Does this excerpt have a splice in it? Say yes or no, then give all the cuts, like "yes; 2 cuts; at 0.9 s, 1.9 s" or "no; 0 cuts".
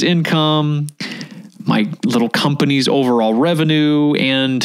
no; 0 cuts